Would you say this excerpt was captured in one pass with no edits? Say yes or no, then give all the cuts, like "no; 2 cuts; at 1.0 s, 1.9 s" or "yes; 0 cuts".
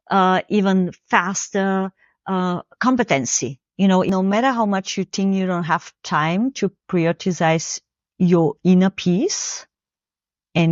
no; 1 cut; at 4.1 s